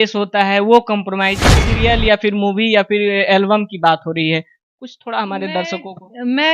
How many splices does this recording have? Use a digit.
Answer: 1